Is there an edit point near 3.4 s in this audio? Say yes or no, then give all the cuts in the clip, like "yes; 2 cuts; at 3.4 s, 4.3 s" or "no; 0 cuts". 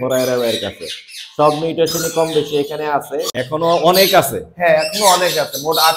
yes; 1 cut; at 3.4 s